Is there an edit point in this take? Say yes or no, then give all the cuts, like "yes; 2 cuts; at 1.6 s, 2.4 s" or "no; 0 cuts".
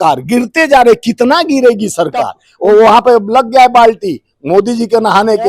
yes; 1 cut; at 2.4 s